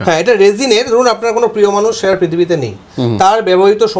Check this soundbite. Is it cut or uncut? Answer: uncut